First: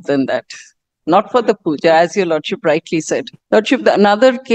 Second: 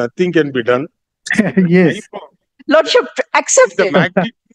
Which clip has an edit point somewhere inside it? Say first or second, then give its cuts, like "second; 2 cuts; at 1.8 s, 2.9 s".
first; 1 cut; at 3.3 s